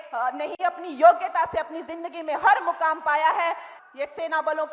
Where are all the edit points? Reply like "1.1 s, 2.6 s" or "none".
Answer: 3.7 s